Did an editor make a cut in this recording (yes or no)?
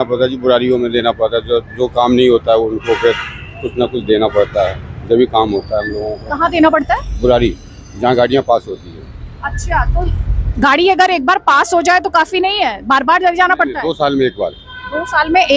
no